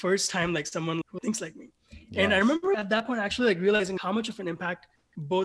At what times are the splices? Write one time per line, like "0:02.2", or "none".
0:01.1
0:02.7
0:04.0